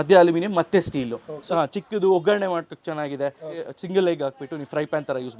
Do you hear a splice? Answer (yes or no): yes